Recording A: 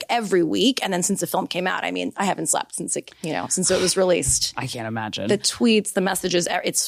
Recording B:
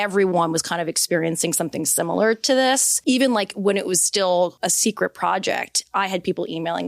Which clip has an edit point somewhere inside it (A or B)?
B